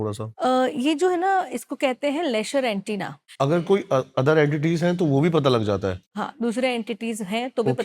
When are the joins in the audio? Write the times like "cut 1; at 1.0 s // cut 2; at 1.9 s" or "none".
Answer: cut 1; at 3.2 s